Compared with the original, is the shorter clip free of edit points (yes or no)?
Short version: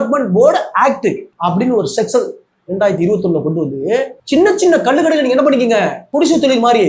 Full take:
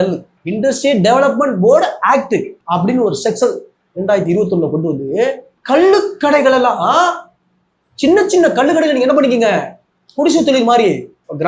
no